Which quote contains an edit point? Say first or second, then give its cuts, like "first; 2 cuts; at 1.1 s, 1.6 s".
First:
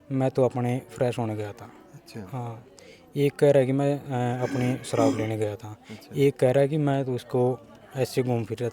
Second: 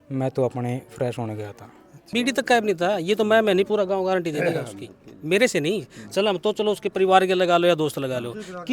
second; 1 cut; at 2.1 s